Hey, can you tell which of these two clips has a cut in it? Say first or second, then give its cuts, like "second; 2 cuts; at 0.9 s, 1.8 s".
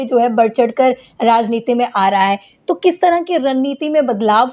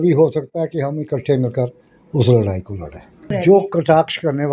second; 1 cut; at 3.2 s